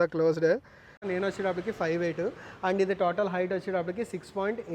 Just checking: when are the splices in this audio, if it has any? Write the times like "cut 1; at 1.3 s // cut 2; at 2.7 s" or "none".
cut 1; at 1.0 s